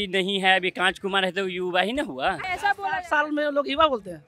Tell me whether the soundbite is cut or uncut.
cut